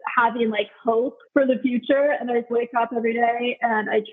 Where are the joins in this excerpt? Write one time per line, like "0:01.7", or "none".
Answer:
0:01.2
0:02.5